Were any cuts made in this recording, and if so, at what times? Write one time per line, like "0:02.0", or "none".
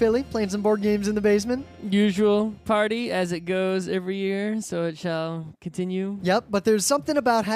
none

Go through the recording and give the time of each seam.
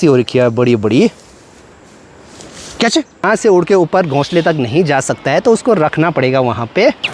0:03.2

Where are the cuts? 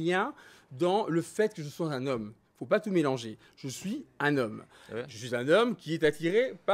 none

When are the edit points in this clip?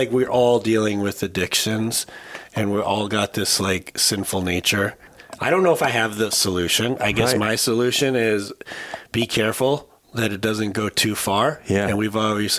0:05.1

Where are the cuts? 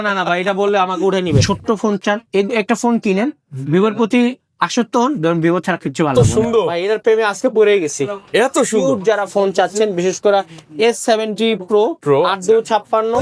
0:01.4
0:06.1

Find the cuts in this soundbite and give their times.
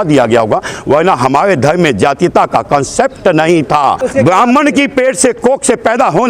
0:04.0

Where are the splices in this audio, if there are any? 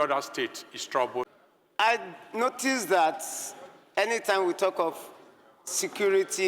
0:01.5

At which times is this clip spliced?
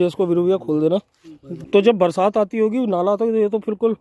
0:01.6

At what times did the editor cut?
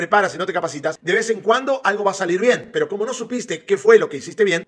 0:01.0

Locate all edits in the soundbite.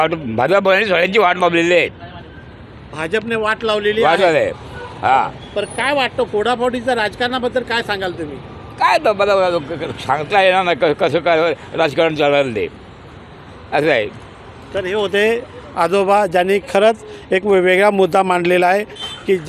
none

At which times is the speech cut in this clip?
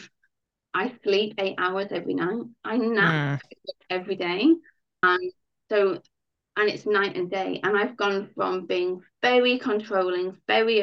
0:05.0

